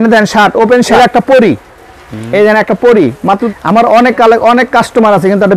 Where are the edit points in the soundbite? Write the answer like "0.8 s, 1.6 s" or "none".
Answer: 0.9 s, 3.4 s